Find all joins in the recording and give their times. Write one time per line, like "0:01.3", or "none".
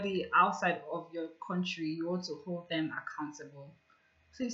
none